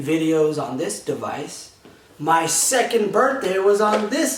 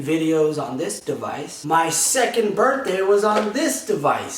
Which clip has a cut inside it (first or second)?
second